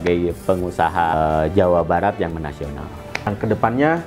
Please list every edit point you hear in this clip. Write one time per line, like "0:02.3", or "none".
0:01.1
0:03.3